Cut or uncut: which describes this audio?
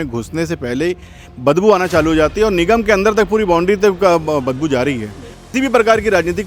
cut